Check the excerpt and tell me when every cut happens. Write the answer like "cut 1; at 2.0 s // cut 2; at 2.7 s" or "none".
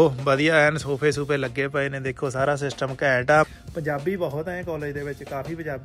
cut 1; at 3.5 s